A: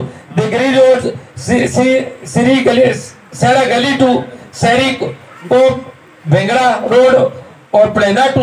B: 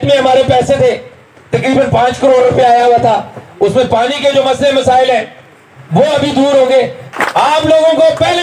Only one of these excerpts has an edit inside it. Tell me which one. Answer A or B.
B